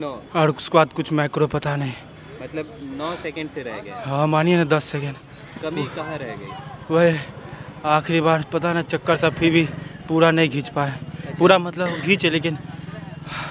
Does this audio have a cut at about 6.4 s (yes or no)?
no